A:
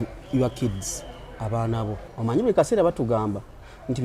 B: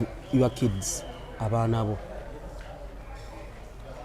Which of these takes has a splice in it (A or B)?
A